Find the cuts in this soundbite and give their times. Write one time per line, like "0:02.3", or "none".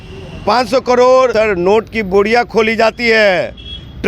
0:01.3